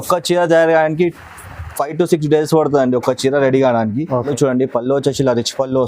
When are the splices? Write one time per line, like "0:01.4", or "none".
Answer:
0:04.3